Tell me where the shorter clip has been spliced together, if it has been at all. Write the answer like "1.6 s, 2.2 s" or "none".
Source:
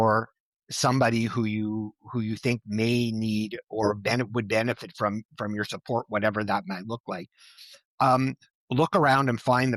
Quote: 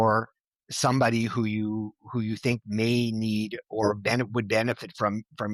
none